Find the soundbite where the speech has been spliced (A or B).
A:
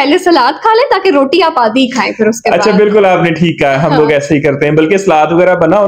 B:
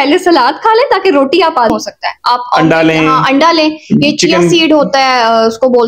B